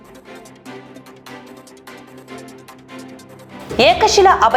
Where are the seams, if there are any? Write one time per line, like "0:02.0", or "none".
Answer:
0:03.1